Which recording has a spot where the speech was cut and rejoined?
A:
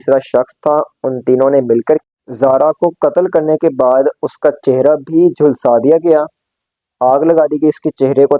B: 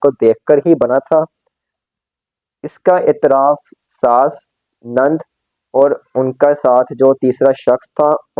A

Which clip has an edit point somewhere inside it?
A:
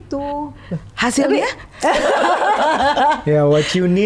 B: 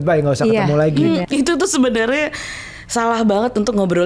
B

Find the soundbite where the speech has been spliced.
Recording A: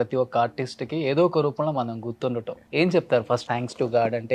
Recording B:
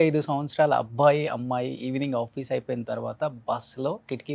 A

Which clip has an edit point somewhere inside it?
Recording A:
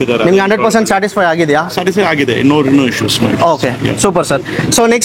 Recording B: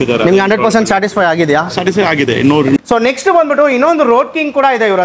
B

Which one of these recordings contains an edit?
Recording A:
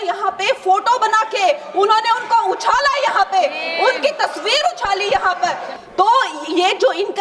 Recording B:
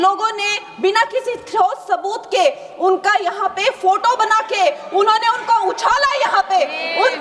A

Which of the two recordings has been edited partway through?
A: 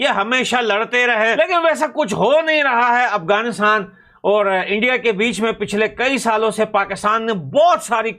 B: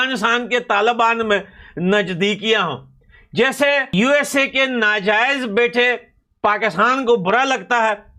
A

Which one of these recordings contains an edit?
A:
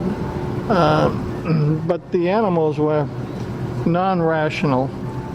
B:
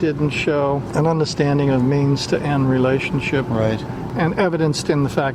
B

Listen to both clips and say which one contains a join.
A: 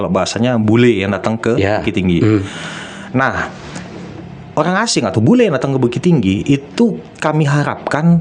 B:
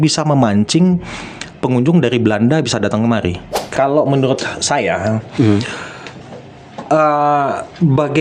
B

